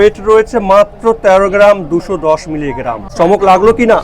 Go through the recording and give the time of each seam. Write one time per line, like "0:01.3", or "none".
0:03.1